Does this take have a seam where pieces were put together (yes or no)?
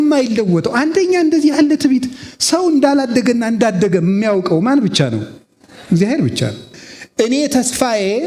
yes